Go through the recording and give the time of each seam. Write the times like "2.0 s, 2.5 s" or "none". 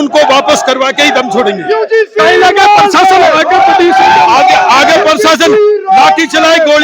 none